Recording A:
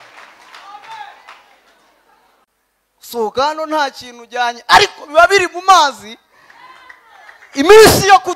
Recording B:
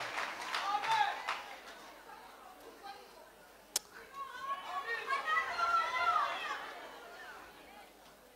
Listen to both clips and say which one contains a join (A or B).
A